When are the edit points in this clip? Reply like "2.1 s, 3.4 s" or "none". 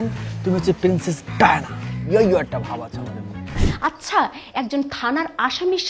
3.6 s

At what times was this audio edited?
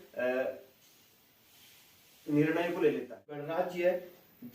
3.5 s

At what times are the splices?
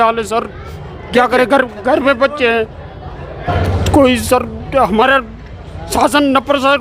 3.5 s

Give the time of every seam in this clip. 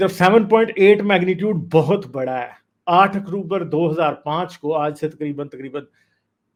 none

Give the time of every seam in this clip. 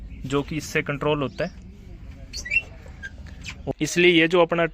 3.7 s

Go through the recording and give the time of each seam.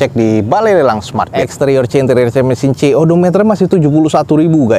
1.4 s

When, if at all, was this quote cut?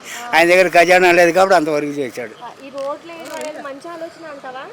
none

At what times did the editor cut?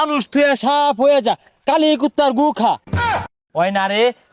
2.9 s

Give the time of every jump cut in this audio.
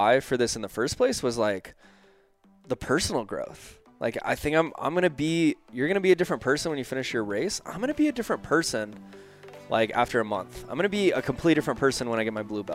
none

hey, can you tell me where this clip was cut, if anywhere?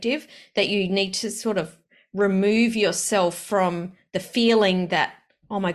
none

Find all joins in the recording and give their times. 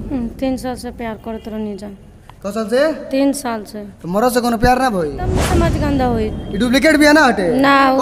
5.6 s

